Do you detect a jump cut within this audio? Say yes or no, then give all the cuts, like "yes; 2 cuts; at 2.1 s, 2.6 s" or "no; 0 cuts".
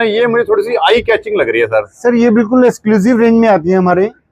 no; 0 cuts